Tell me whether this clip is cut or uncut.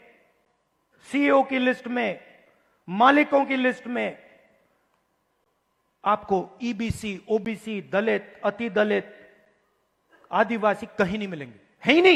uncut